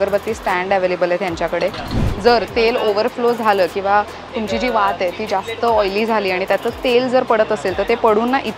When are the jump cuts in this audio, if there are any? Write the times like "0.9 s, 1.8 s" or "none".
2.1 s